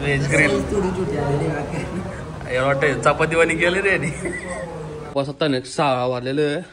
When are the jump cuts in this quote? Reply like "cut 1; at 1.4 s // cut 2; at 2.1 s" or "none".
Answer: cut 1; at 5.0 s